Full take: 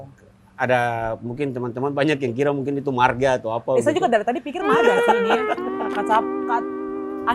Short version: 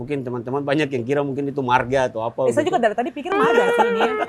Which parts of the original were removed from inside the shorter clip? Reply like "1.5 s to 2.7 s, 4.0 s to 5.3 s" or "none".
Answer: none